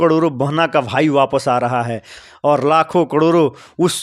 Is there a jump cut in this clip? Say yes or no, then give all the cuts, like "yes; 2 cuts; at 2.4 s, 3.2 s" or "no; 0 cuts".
yes; 1 cut; at 2.2 s